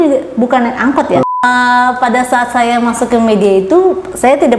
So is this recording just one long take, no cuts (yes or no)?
no